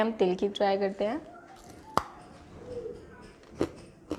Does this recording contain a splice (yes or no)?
no